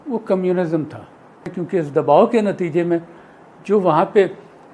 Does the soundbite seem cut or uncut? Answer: cut